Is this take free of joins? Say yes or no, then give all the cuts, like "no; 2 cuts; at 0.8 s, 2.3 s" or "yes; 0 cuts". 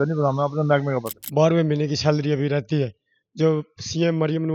no; 1 cut; at 1.1 s